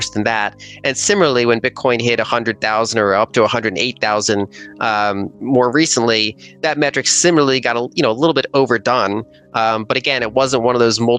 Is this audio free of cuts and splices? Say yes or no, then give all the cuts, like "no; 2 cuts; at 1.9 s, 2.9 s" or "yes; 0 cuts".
yes; 0 cuts